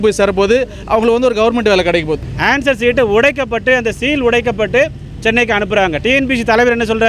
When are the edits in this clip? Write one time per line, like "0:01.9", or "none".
0:02.2